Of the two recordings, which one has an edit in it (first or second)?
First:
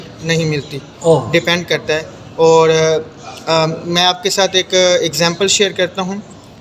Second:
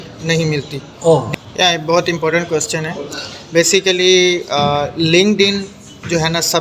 second